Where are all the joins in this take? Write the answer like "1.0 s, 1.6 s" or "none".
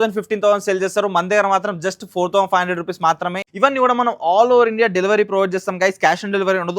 3.4 s